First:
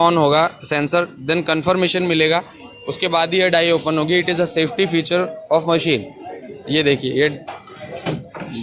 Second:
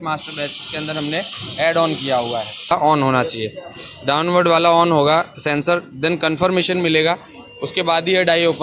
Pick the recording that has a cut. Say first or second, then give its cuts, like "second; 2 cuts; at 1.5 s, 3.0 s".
second; 1 cut; at 2.7 s